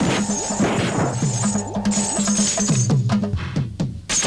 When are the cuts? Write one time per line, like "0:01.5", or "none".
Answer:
0:03.3